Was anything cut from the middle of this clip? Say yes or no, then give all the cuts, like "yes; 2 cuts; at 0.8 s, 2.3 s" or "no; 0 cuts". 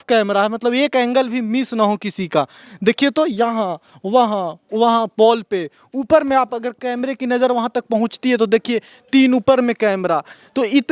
no; 0 cuts